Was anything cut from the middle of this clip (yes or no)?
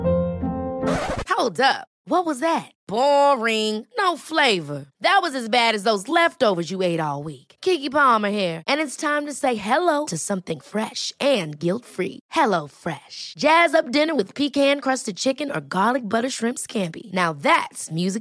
no